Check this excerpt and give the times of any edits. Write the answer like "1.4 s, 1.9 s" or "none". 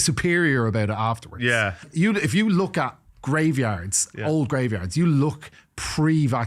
1.9 s